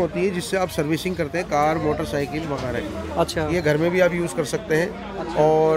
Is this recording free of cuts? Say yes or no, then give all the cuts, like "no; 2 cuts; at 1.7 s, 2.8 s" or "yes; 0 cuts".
yes; 0 cuts